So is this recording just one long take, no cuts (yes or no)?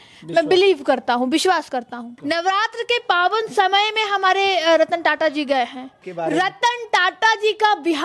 no